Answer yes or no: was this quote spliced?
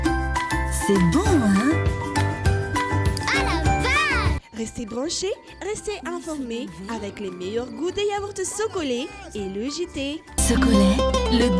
no